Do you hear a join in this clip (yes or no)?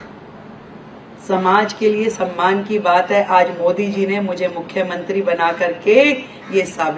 no